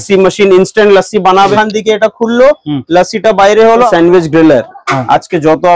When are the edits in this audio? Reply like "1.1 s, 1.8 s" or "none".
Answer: 1.5 s, 3.9 s